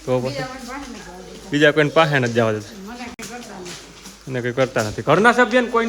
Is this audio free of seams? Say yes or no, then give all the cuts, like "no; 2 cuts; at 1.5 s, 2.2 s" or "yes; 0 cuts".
yes; 0 cuts